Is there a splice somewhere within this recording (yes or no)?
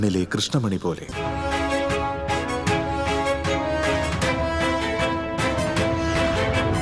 yes